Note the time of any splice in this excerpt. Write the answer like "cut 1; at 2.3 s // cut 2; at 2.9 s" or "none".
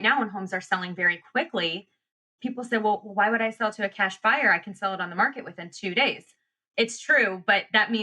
cut 1; at 2.2 s // cut 2; at 6.6 s